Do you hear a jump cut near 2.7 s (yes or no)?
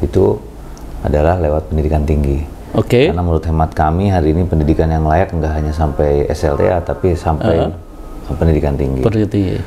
no